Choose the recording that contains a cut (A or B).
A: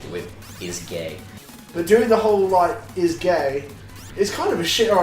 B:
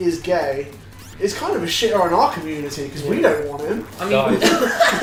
A